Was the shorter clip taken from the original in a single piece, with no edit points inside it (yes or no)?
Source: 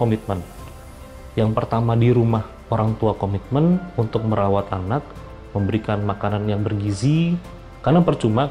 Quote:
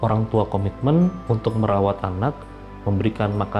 yes